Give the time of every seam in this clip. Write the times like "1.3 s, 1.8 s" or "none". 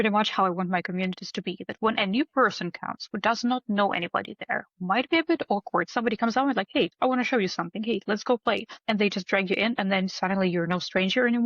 5.9 s, 6.9 s, 8.7 s